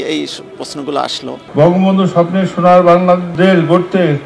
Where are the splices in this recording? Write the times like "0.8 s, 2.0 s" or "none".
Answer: 1.4 s, 3.3 s